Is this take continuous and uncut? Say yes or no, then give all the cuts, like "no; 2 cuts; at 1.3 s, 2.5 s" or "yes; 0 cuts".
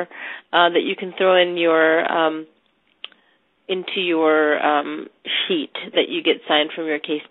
no; 1 cut; at 6.1 s